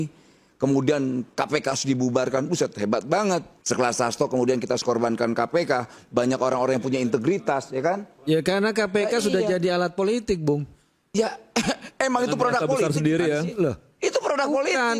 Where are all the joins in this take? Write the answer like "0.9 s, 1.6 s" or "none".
3.5 s